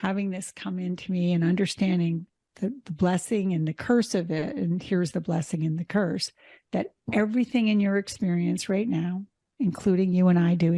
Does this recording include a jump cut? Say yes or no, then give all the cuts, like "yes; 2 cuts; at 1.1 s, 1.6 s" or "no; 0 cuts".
no; 0 cuts